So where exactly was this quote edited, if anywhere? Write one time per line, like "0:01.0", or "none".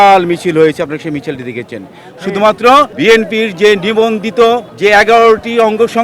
0:02.9
0:04.7